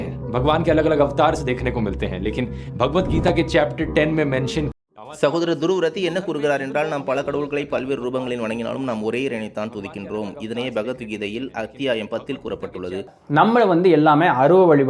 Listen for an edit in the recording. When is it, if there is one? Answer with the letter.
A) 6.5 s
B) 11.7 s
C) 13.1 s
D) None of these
C